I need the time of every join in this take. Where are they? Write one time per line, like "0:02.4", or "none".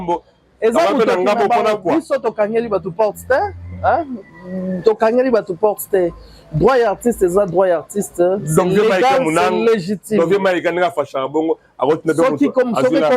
none